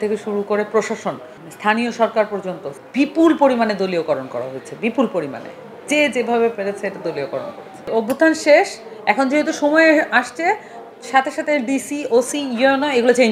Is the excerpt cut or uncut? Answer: cut